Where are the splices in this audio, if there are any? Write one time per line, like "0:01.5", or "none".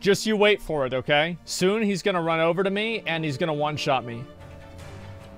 0:01.4